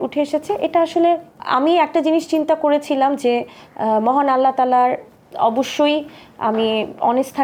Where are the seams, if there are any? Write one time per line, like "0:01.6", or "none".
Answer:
none